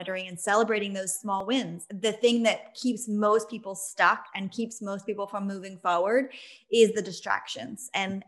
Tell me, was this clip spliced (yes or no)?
yes